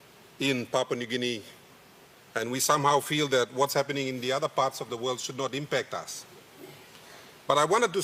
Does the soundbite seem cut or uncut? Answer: uncut